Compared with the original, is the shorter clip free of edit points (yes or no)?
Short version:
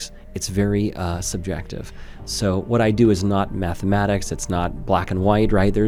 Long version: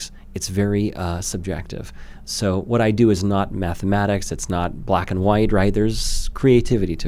yes